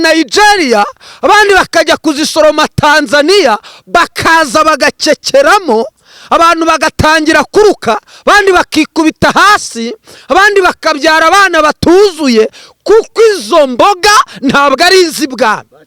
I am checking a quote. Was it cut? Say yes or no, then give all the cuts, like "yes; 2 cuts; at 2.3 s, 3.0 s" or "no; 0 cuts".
no; 0 cuts